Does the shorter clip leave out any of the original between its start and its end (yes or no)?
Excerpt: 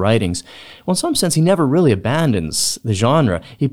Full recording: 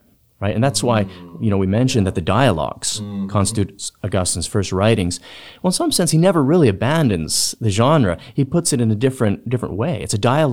no